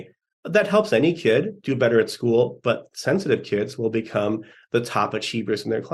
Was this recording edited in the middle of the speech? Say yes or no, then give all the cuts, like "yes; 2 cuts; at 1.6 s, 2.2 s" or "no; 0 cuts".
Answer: no; 0 cuts